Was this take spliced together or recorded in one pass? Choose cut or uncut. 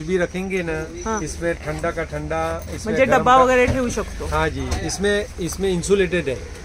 uncut